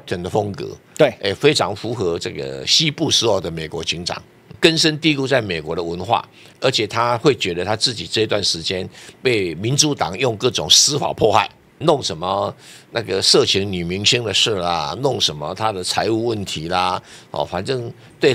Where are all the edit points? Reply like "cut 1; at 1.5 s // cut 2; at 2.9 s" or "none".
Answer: cut 1; at 4.4 s // cut 2; at 6.5 s // cut 3; at 11.8 s